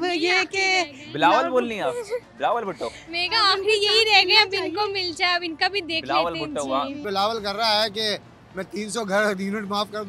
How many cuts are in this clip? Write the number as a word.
one